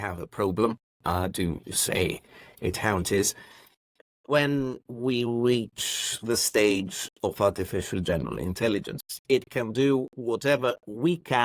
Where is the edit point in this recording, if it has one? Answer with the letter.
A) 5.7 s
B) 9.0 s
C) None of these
B